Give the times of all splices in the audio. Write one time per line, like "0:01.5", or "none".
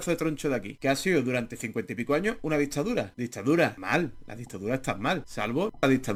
none